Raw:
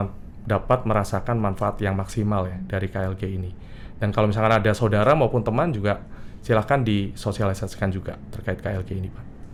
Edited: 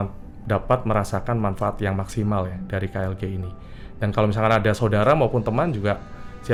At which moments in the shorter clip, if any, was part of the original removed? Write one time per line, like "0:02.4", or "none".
none